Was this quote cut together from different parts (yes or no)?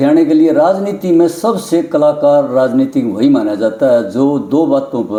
no